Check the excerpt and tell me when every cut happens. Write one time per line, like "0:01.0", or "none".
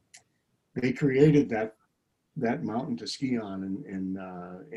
none